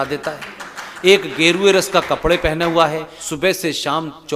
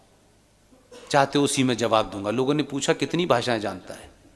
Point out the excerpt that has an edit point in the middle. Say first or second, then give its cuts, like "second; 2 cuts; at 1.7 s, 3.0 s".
first; 1 cut; at 3.2 s